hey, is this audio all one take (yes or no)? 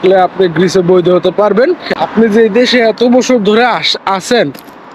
no